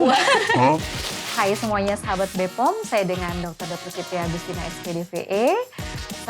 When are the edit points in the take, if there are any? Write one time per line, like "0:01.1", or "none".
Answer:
0:01.1